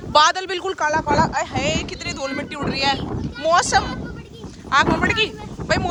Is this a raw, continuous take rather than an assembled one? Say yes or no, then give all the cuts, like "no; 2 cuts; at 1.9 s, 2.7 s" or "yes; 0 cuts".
yes; 0 cuts